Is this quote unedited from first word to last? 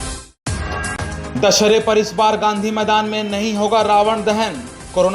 no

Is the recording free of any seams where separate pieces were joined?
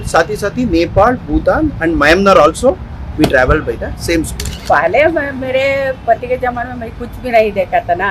no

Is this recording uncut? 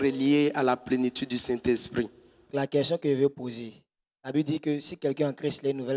no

